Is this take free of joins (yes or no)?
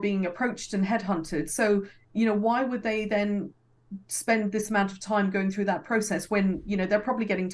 yes